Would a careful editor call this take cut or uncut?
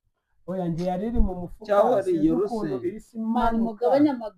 uncut